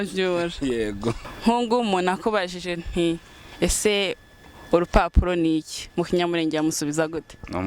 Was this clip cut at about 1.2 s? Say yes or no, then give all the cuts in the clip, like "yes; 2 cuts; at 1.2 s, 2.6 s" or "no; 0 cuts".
yes; 1 cut; at 1.2 s